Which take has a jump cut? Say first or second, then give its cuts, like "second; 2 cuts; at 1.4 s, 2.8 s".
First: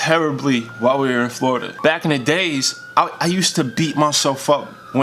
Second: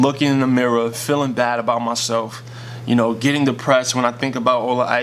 first; 1 cut; at 1.7 s